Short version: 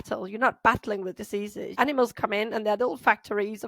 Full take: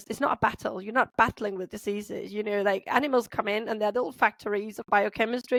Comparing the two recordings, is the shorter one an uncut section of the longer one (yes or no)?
no